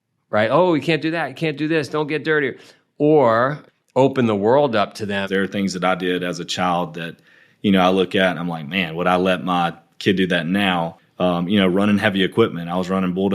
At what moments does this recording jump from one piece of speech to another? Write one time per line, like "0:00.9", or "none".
0:03.6
0:05.2
0:11.0

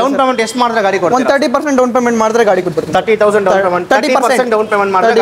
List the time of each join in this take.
none

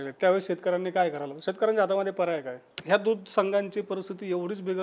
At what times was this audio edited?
0:02.7

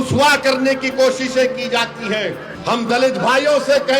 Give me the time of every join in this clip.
0:02.5

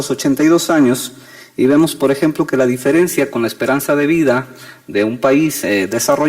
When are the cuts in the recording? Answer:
0:04.7

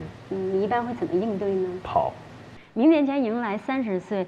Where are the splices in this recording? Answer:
0:02.6

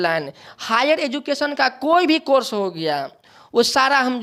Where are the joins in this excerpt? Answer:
none

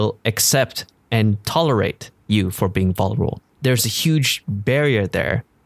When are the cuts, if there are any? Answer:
0:03.4

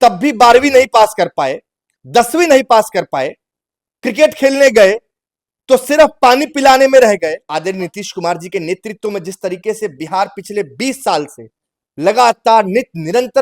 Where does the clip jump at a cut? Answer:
0:07.5

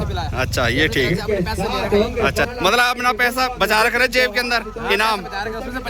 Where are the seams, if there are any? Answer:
0:02.5

